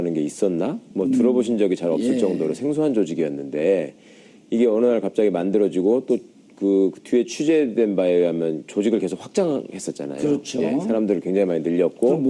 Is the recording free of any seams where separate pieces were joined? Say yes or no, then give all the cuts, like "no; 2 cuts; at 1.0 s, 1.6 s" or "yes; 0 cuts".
yes; 0 cuts